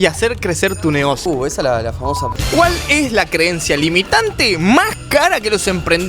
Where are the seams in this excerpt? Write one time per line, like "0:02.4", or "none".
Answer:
0:01.2
0:02.3